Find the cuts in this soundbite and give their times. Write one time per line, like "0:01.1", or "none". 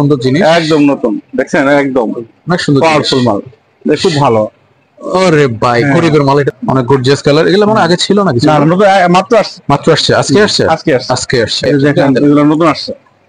0:06.5
0:11.7